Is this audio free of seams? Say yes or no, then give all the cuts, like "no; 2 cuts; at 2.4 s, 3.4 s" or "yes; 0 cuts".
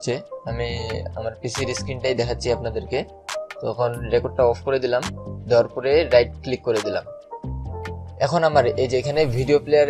yes; 0 cuts